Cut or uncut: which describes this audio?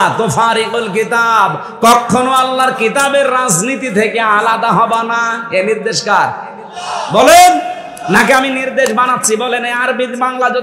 uncut